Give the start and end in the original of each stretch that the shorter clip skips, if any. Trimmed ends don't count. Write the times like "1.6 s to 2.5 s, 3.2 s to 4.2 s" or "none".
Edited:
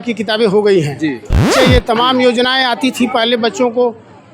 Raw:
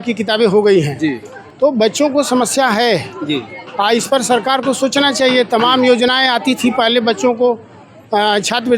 1.5 s to 5.1 s